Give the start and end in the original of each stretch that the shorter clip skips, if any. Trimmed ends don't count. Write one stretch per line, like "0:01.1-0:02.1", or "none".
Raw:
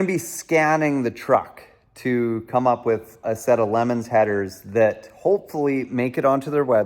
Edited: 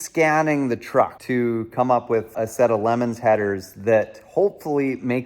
0:01.5-0:02.0
0:03.1-0:03.2